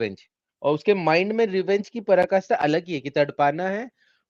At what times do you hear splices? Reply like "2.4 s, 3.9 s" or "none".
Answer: none